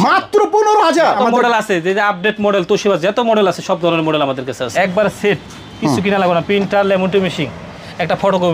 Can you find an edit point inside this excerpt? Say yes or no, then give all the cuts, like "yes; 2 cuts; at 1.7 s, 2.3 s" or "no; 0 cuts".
yes; 2 cuts; at 1.2 s, 4.7 s